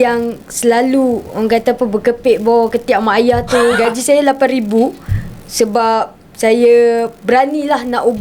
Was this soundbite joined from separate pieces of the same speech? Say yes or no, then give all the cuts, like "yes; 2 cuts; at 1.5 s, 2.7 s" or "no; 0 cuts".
yes; 1 cut; at 3.8 s